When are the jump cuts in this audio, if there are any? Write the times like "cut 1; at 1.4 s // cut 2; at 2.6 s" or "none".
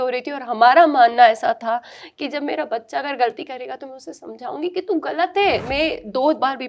cut 1; at 5.7 s

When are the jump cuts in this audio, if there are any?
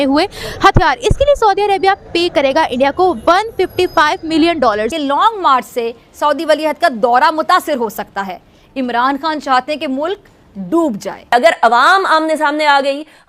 cut 1; at 4.9 s // cut 2; at 11.3 s

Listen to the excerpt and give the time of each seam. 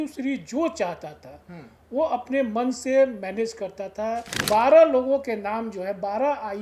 cut 1; at 4.3 s

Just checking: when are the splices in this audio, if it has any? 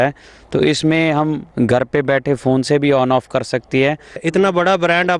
cut 1; at 4.2 s

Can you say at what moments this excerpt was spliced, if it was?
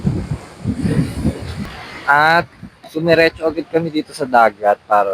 cut 1; at 1.7 s

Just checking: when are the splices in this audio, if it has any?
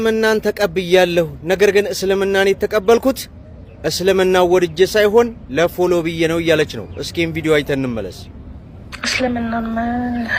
none

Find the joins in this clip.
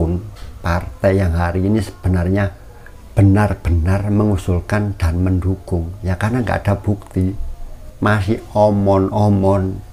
none

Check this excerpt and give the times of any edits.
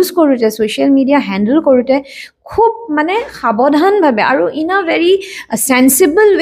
none

